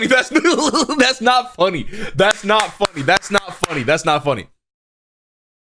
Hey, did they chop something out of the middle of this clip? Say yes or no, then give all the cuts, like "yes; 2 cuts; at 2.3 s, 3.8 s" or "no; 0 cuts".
no; 0 cuts